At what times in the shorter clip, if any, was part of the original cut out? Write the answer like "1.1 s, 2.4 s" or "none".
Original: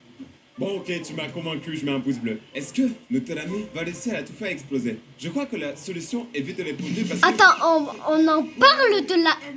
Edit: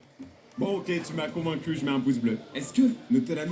none

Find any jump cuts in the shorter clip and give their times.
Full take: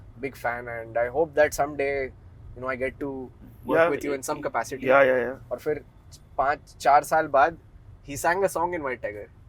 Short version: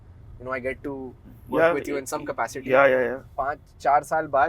3.2 s

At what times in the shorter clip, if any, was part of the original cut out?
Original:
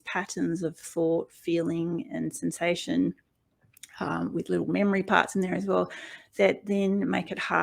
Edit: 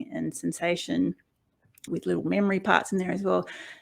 1.9 s

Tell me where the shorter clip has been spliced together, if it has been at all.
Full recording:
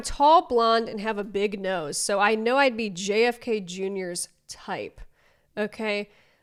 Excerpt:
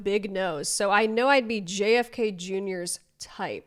none

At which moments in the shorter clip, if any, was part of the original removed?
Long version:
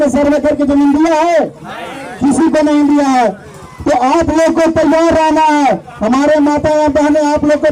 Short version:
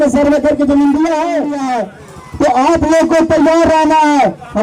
1.6 s

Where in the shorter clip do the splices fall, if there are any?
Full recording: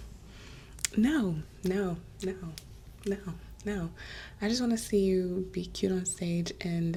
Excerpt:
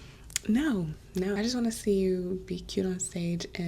1.4 s

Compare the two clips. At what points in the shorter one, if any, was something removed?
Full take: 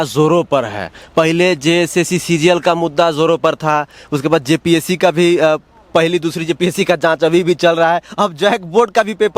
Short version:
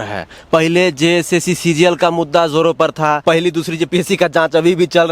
3.2 s

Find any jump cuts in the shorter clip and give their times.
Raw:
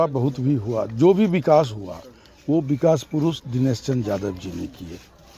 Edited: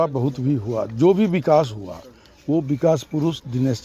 none

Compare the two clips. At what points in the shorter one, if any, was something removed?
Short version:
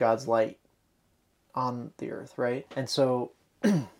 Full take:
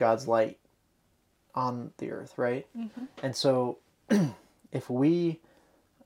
2.7 s

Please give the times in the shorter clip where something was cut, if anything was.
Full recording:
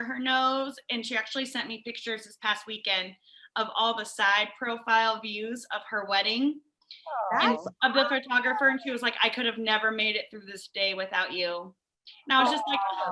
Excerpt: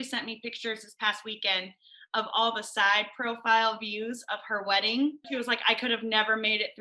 5.3 s

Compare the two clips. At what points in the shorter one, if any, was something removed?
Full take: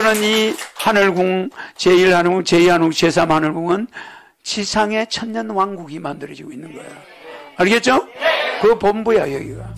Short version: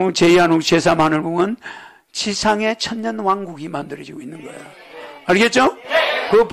none

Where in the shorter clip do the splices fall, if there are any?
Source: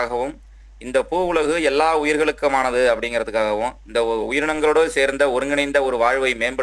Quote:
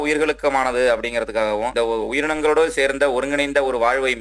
1.7 s

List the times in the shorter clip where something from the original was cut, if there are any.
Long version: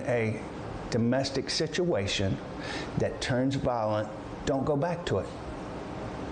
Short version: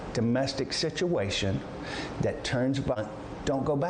3.0 s

